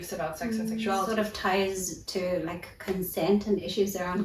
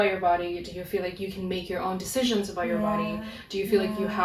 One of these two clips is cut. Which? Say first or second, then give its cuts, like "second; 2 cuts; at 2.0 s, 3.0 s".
first; 1 cut; at 1.1 s